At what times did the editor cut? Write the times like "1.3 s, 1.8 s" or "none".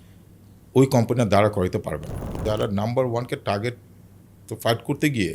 2.4 s